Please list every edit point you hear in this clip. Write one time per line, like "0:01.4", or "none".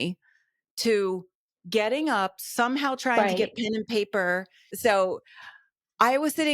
0:04.7

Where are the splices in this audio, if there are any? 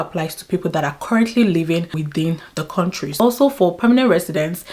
0:01.9
0:03.1

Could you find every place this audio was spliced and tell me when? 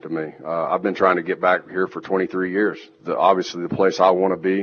0:02.9

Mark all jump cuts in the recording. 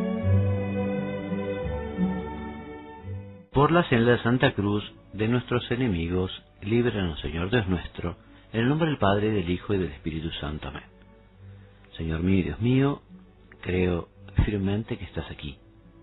0:09.4

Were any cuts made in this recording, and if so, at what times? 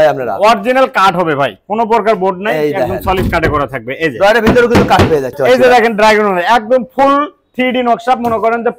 0:05.3

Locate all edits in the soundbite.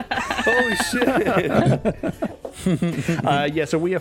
0:02.5

